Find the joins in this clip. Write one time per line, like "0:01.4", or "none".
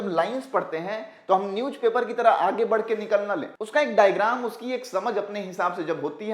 0:03.5